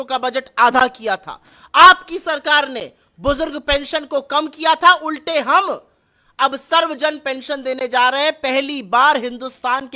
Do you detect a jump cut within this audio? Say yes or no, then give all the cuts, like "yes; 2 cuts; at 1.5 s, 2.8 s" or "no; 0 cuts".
no; 0 cuts